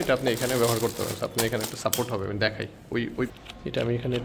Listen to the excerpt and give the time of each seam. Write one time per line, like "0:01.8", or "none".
0:03.3